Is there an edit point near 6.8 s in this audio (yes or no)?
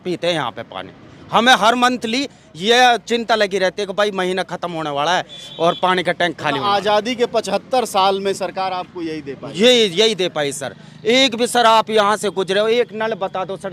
no